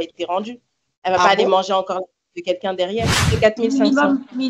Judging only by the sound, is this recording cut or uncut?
cut